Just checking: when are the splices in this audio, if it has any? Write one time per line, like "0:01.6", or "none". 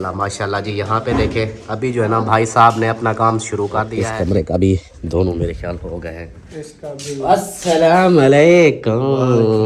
0:04.0